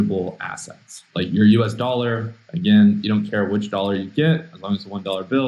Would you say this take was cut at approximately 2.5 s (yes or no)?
no